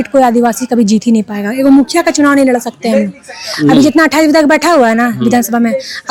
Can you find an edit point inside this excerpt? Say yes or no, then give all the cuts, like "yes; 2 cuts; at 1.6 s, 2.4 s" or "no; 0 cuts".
no; 0 cuts